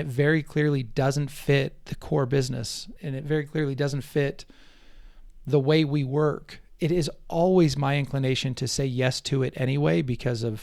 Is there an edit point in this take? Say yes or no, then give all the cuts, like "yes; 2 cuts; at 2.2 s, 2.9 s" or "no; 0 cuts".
yes; 1 cut; at 2.9 s